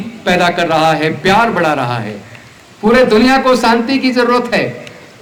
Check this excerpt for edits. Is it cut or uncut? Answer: uncut